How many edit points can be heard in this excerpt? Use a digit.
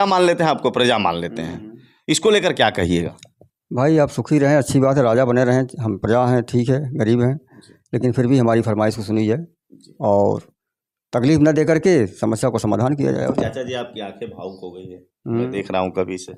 0